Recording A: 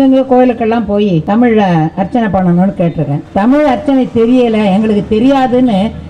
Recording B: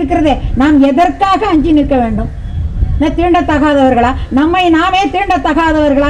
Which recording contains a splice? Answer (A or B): A